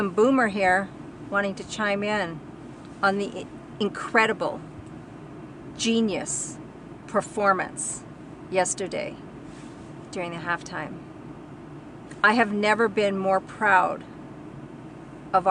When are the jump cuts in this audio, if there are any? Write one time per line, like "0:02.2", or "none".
none

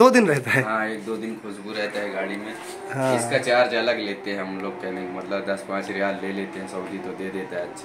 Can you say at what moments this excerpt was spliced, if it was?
none

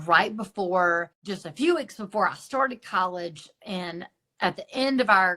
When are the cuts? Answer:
0:01.2

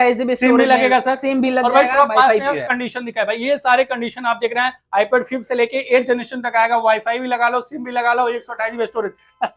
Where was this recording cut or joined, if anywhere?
none

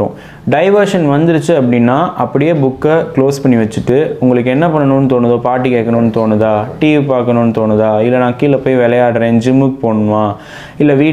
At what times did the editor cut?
none

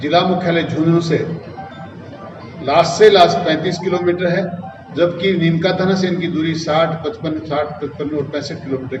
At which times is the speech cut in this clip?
none

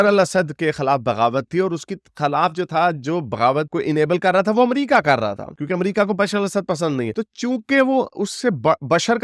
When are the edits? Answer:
none

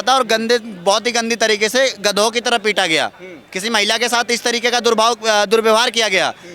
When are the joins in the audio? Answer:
none

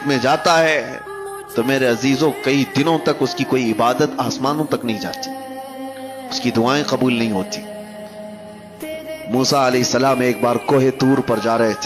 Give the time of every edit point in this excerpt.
0:10.0

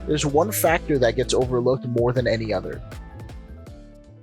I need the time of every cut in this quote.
none

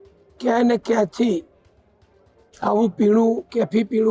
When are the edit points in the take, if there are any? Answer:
none

